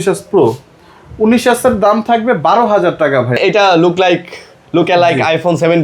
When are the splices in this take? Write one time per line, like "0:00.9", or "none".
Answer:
0:03.4